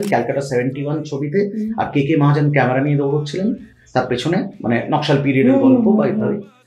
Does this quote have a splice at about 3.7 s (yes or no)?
no